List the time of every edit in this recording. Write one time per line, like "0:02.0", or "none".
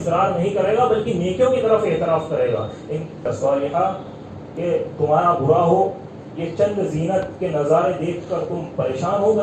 0:03.2